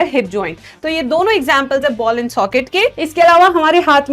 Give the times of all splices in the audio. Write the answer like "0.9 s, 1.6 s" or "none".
3.0 s

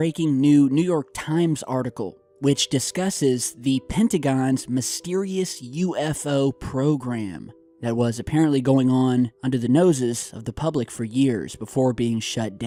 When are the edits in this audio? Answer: none

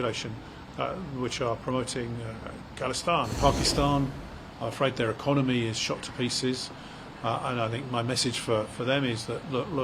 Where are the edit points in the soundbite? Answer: 3.4 s

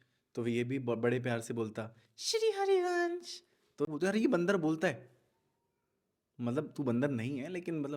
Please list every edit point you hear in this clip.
3.9 s

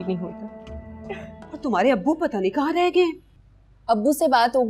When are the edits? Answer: 1.4 s

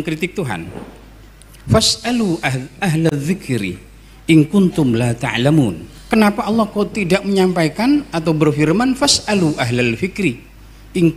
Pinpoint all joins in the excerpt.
5.9 s

